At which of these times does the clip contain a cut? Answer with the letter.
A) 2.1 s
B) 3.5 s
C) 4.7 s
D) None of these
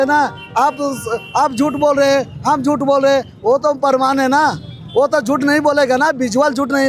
D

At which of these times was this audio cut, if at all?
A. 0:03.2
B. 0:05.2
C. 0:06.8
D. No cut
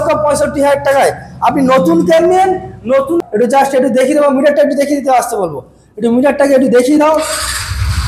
A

